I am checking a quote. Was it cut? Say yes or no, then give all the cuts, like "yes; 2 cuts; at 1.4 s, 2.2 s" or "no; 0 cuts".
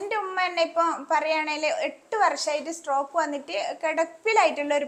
no; 0 cuts